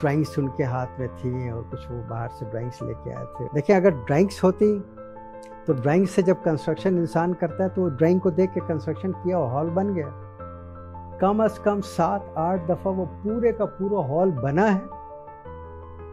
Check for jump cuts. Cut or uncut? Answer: cut